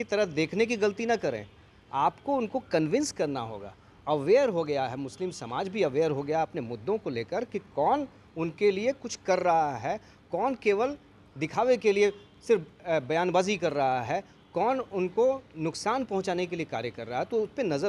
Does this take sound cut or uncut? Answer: uncut